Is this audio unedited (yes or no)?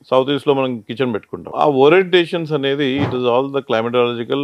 no